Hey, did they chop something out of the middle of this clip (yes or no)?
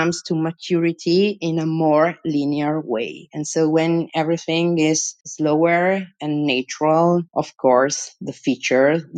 no